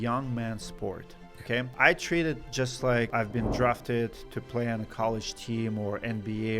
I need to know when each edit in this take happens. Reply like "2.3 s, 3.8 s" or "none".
1.7 s, 3.1 s